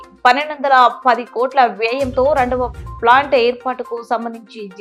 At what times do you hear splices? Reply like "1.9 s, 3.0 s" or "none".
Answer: none